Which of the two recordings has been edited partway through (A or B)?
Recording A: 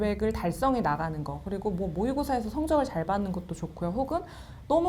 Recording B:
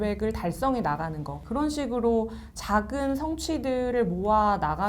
B